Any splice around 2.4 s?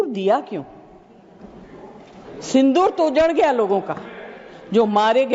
no; 0 cuts

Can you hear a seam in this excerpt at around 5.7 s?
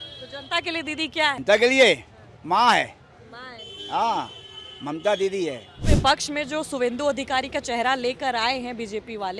yes; 2 cuts; at 1.4 s, 5.7 s

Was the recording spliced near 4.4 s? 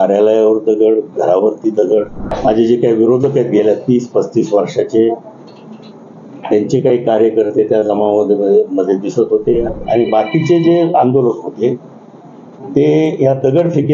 no; 2 cuts; at 2.3 s, 9.7 s

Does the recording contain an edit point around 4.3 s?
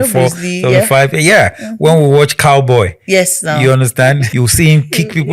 yes; 1 cut; at 4.3 s

